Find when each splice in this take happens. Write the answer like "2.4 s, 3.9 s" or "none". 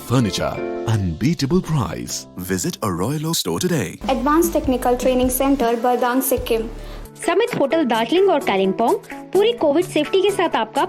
3.9 s, 6.9 s